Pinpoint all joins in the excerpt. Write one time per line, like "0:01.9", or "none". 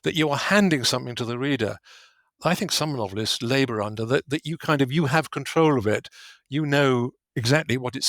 0:02.4